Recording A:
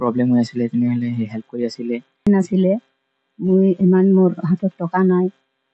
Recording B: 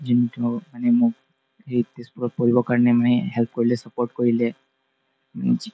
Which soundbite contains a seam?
A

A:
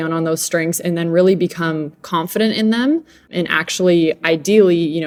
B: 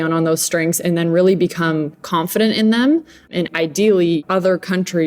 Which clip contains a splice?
B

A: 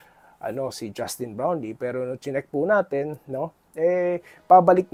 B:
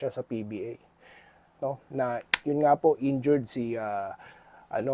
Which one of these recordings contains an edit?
B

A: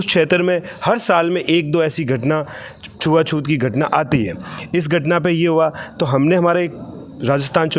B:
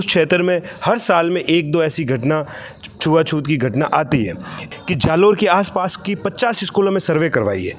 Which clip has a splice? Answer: B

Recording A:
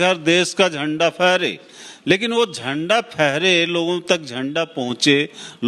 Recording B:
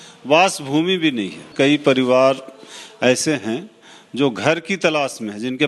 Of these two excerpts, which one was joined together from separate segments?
B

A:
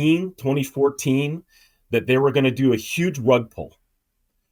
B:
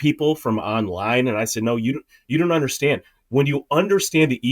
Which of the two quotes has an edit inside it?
B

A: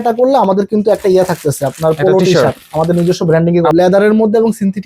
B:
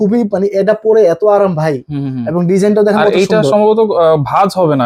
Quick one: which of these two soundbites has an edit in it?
A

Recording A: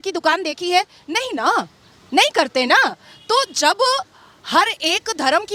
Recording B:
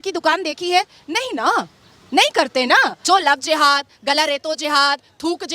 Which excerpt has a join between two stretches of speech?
B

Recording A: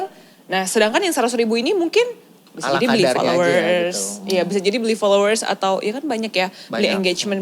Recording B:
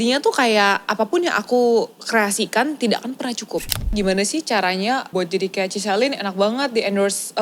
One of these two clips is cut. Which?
B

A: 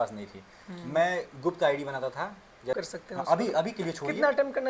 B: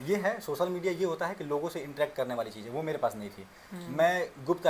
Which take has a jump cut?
A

